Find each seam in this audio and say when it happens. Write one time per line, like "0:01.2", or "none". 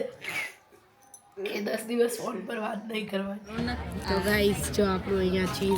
0:03.5